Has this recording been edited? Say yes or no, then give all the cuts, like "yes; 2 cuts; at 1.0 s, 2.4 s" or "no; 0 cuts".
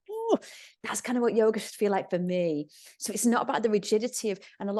no; 0 cuts